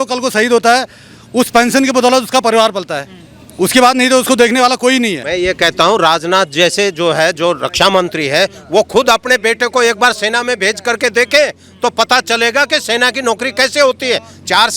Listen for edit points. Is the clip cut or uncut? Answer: cut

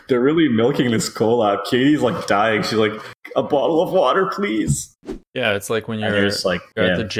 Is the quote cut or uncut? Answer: cut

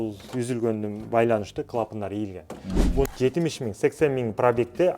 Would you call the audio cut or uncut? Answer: cut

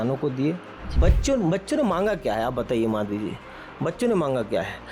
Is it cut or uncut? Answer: cut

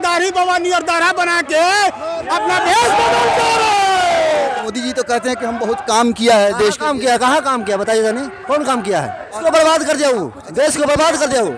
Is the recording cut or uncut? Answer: cut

